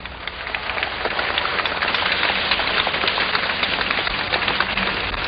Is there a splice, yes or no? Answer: no